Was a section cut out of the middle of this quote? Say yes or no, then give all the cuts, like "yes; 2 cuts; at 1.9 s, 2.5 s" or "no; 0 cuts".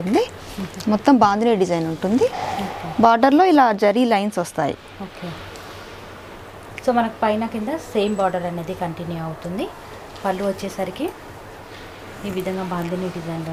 no; 0 cuts